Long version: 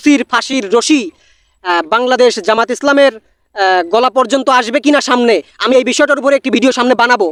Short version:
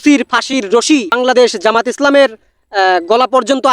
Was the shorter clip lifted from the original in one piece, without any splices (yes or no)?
no